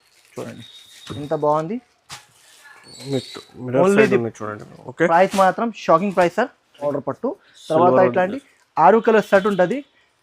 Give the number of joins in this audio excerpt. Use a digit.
1